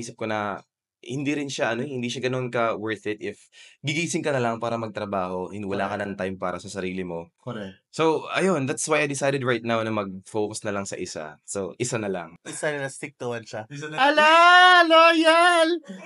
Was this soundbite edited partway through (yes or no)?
no